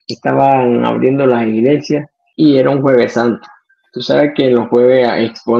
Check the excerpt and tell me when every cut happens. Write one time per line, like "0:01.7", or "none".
0:02.2